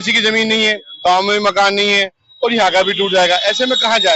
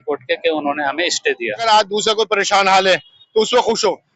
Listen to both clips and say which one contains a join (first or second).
second